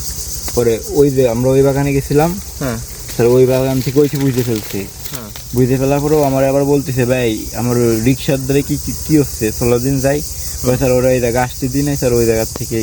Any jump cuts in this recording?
no; 0 cuts

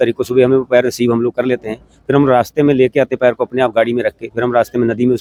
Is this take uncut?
yes; 0 cuts

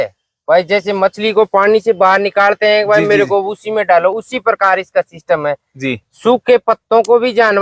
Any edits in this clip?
no; 0 cuts

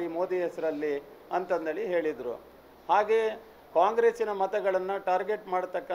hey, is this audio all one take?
yes; 0 cuts

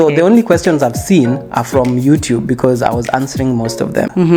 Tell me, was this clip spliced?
no; 0 cuts

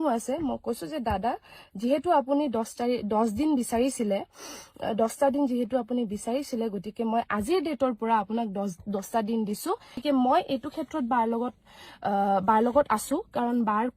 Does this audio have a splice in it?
yes; 1 cut; at 10.0 s

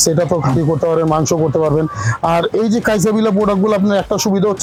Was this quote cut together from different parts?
no; 0 cuts

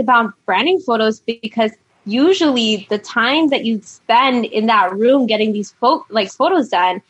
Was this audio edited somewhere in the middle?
no; 0 cuts

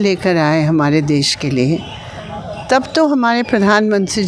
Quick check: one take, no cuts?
yes; 0 cuts

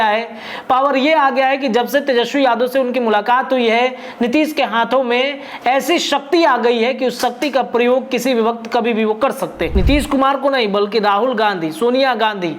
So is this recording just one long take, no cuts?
no; 1 cut; at 9.7 s

